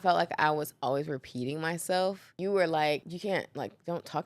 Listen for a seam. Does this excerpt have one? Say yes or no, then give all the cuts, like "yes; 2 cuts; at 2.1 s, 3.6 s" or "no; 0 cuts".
yes; 2 cuts; at 2.3 s, 3.1 s